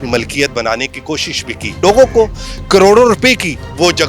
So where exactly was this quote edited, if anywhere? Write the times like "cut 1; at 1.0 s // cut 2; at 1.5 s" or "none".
cut 1; at 1.7 s